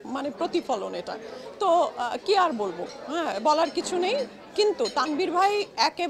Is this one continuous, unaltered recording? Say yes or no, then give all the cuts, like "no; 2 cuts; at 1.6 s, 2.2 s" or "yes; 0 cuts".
yes; 0 cuts